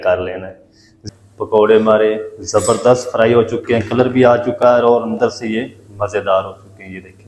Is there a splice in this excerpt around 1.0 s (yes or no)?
yes